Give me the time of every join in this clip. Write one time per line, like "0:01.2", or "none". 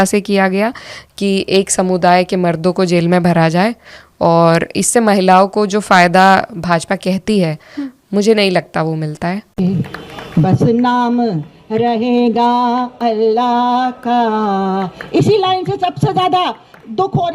0:09.5